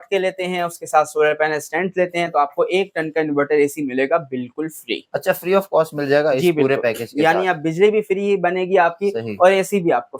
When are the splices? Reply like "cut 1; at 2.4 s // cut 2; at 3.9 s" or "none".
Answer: none